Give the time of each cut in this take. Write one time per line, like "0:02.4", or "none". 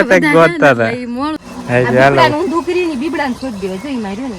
0:01.4